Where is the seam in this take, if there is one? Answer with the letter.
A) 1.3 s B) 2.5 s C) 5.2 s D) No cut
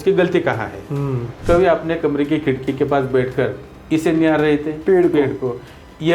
A